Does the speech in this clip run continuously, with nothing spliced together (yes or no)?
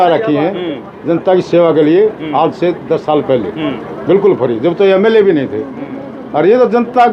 yes